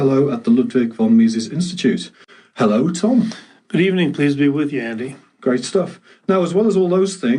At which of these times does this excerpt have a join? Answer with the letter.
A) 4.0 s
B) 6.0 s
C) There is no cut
B